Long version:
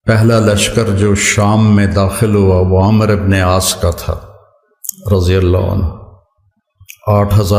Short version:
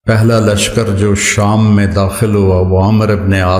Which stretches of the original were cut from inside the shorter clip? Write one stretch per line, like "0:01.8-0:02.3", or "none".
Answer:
none